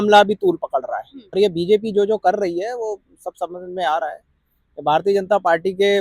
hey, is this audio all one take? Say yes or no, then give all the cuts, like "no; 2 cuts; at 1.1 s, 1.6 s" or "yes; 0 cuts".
no; 1 cut; at 1.4 s